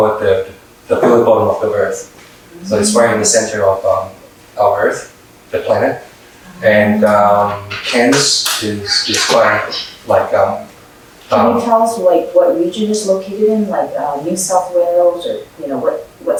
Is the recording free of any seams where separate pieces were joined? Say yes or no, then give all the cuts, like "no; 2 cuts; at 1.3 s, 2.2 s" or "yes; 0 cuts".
yes; 0 cuts